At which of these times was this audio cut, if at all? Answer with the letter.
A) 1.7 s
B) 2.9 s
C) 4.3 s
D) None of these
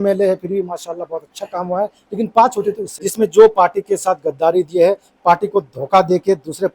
B